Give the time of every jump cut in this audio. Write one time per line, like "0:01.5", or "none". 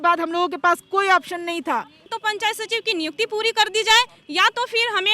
0:02.1